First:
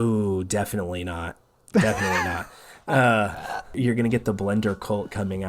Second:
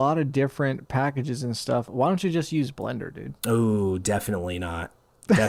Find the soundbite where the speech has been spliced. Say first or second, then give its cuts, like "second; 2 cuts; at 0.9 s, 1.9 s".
first; 1 cut; at 3.8 s